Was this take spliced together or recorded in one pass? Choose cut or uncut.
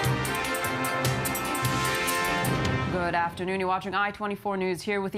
cut